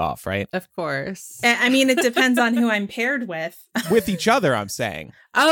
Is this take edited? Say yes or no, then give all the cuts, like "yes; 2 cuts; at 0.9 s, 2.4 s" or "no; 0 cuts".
yes; 2 cuts; at 1.4 s, 3.9 s